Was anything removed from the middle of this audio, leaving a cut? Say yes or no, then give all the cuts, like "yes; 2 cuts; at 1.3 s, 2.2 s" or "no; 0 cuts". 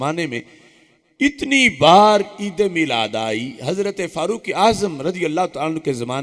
no; 0 cuts